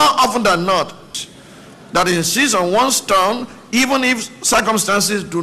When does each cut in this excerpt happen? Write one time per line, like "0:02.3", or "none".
0:01.0